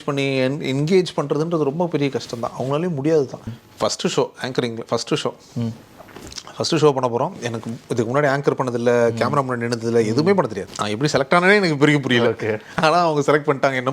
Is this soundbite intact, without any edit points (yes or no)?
no